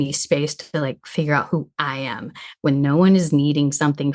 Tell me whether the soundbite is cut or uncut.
uncut